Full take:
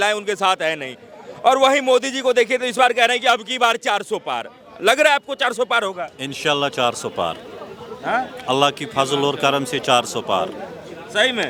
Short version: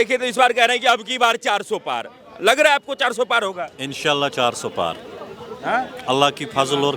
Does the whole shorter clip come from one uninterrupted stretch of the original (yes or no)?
yes